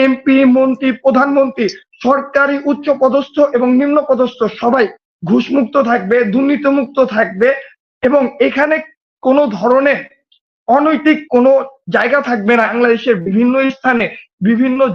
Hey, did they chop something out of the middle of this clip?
yes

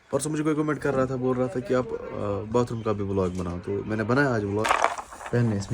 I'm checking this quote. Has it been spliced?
yes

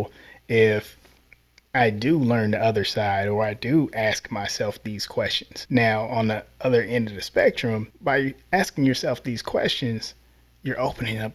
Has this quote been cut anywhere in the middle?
yes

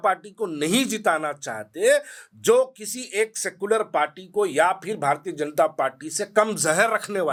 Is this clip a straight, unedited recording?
yes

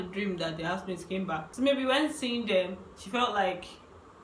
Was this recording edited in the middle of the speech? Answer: yes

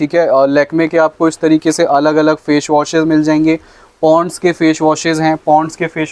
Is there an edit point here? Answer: no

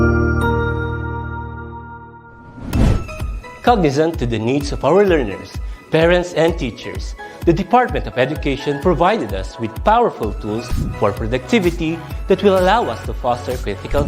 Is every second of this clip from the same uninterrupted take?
no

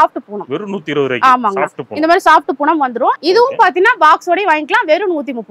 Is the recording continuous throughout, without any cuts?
no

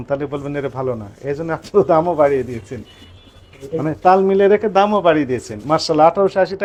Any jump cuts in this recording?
no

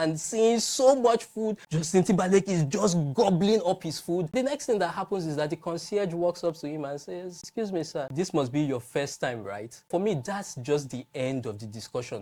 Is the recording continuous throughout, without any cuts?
yes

